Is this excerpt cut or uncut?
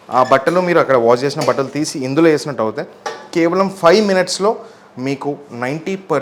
uncut